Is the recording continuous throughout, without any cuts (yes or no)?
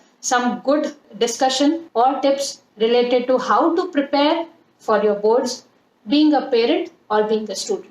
no